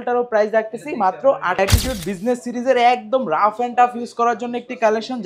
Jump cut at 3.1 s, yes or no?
no